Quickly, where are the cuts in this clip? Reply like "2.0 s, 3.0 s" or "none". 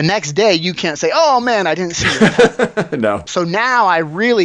3.2 s